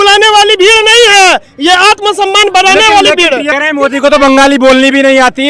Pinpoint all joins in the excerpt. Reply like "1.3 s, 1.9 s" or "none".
3.5 s